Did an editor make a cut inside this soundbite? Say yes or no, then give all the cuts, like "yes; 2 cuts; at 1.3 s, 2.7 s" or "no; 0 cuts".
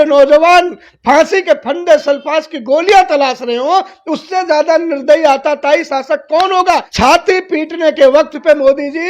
yes; 1 cut; at 6.9 s